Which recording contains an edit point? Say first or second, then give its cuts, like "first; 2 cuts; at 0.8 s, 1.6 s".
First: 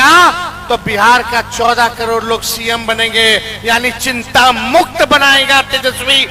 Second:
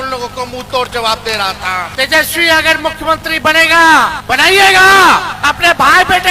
second; 3 cuts; at 1.9 s, 4.2 s, 5.3 s